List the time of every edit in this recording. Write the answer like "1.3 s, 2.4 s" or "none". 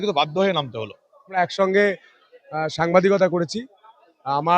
1.4 s